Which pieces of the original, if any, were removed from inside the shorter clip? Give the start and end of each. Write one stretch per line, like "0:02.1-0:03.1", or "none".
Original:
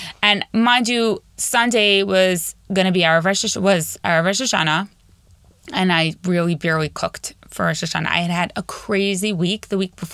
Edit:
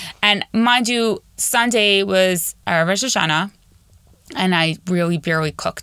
0:02.5-0:03.9